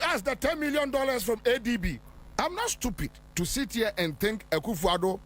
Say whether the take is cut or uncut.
cut